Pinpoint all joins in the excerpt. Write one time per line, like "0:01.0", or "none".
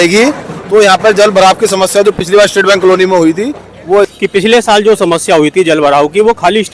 0:04.1